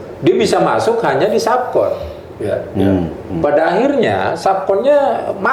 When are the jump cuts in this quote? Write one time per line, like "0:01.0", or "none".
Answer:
none